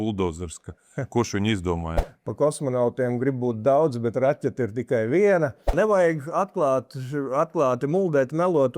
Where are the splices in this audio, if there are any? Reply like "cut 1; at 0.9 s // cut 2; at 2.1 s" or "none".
cut 1; at 2.0 s // cut 2; at 5.7 s